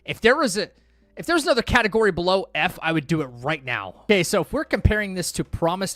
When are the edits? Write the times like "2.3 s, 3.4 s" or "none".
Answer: 4.0 s